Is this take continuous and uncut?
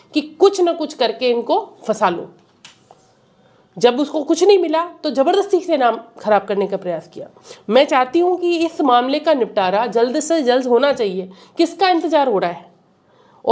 yes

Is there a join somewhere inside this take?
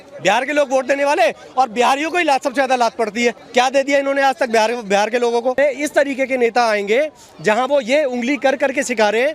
yes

